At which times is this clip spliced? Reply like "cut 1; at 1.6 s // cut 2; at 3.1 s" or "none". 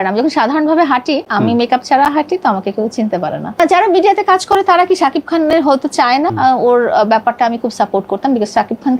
cut 1; at 3.6 s // cut 2; at 6.3 s